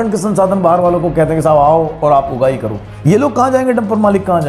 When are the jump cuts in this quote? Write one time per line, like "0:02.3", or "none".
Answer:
none